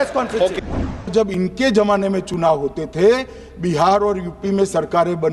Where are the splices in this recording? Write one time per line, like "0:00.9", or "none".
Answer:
0:01.1